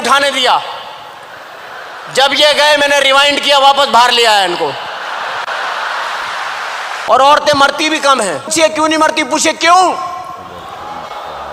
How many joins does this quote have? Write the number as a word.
two